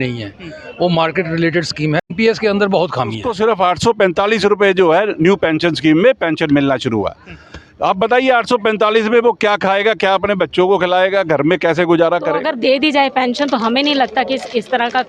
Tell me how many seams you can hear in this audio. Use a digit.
3